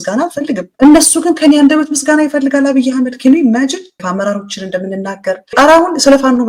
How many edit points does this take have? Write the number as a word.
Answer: zero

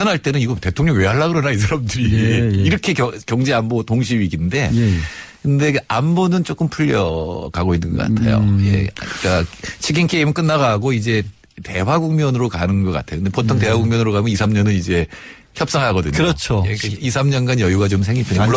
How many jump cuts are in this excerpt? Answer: zero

